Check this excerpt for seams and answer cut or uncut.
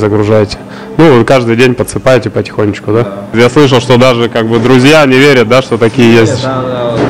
cut